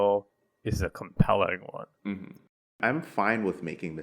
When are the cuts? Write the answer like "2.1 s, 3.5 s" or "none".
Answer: 2.7 s

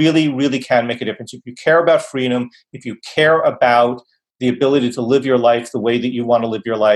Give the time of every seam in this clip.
none

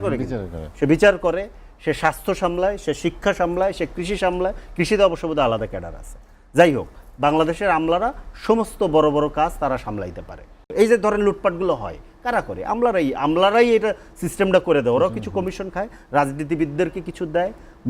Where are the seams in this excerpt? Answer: 10.6 s

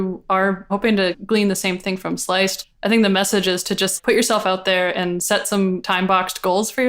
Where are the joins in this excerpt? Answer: 0.9 s, 2.6 s, 3.9 s, 5.8 s

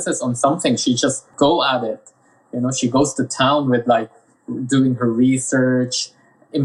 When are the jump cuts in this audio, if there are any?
none

